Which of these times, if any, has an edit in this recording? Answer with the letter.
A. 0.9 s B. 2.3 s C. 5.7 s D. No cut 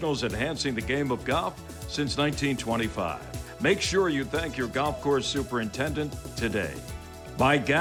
D